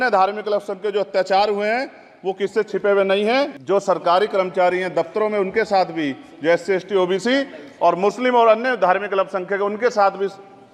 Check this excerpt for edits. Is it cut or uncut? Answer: cut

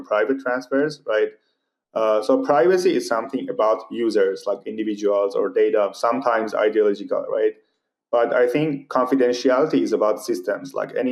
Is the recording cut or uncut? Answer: uncut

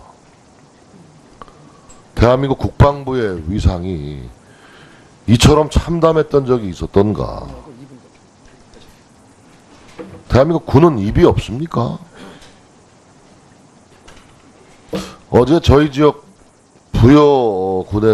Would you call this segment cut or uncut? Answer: uncut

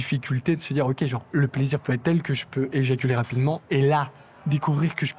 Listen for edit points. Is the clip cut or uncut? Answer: cut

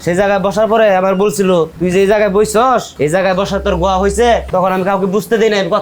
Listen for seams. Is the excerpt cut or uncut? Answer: uncut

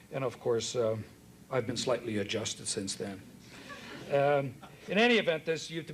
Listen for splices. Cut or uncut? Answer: uncut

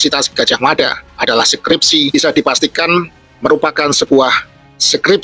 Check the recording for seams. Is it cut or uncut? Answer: cut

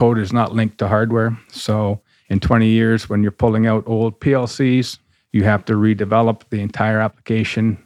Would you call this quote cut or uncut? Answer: uncut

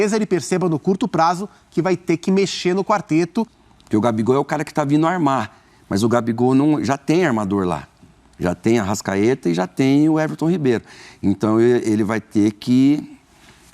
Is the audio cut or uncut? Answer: cut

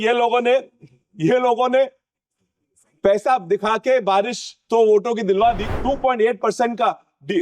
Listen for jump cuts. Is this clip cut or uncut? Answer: cut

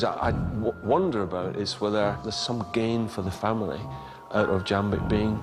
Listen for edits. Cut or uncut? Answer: cut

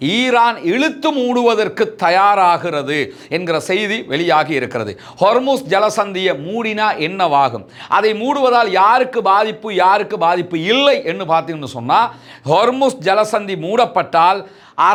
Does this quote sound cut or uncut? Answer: uncut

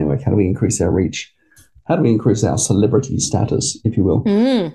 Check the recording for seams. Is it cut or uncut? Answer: uncut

